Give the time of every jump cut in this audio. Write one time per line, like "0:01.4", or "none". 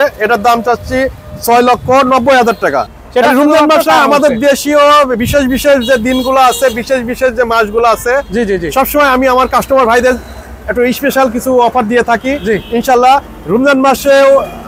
0:02.9